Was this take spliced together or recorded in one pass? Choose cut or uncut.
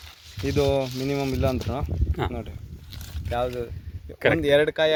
uncut